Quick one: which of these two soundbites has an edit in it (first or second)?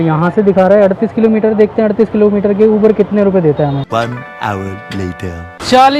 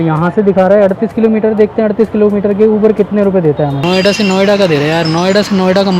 second